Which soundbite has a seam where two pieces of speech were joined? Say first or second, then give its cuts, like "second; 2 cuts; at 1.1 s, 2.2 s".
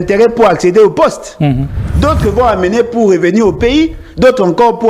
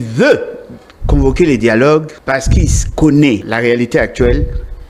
second; 2 cuts; at 2.2 s, 3.5 s